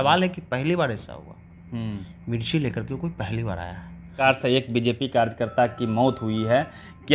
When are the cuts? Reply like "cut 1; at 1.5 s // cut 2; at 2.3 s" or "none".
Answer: cut 1; at 4.2 s